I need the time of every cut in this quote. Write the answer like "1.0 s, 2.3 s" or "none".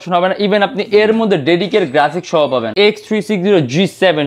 2.7 s